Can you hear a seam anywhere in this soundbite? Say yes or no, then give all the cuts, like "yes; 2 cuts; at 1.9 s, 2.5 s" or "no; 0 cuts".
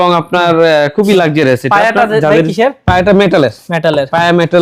no; 0 cuts